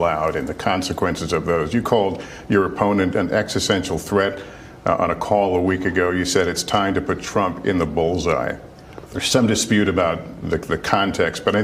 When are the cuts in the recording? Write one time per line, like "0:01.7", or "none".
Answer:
0:08.7